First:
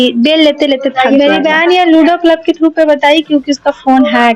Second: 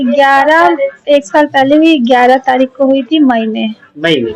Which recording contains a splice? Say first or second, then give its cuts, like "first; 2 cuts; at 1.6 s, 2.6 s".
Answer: first; 1 cut; at 0.9 s